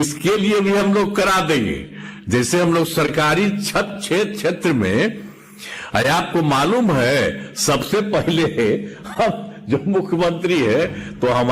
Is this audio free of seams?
yes; 0 cuts

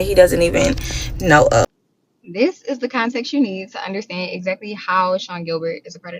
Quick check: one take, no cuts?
no; 1 cut; at 1.7 s

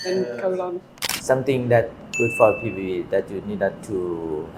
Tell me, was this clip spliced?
no; 0 cuts

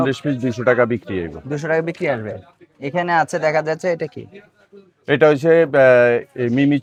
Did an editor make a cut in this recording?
no; 0 cuts

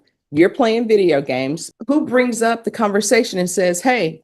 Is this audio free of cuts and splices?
no; 1 cut; at 1.6 s

